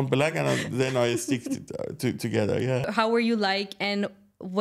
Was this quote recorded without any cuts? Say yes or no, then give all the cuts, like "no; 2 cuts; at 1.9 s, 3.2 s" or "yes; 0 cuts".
no; 1 cut; at 2.9 s